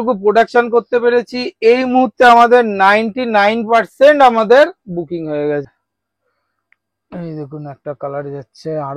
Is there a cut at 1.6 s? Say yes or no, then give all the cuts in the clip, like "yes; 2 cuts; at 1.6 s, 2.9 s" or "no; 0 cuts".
no; 1 cut; at 5.6 s